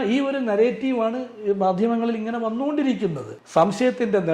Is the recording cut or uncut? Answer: cut